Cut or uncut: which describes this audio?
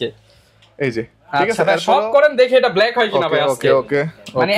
uncut